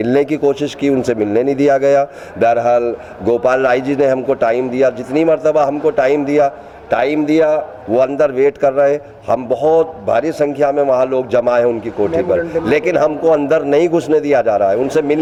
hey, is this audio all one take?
yes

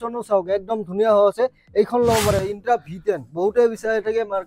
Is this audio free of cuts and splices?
no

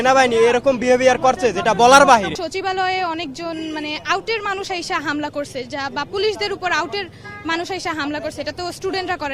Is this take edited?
yes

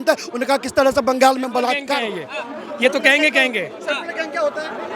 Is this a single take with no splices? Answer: no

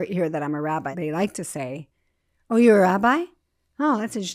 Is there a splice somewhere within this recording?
yes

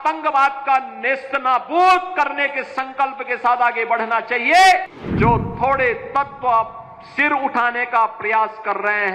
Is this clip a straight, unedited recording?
no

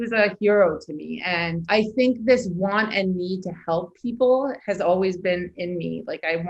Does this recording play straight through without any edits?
no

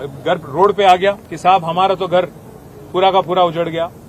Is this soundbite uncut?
no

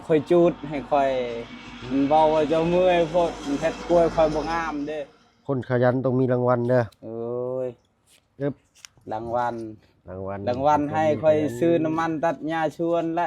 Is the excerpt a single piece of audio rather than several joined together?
no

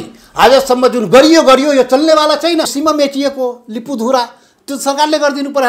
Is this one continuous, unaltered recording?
no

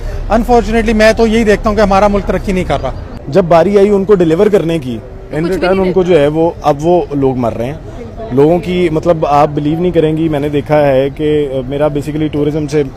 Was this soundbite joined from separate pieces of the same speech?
no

